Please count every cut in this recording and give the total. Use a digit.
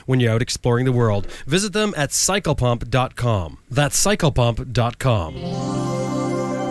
1